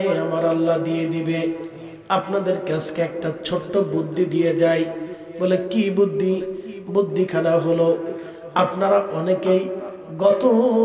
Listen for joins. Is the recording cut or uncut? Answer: uncut